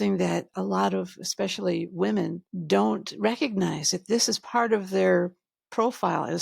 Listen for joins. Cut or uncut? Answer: cut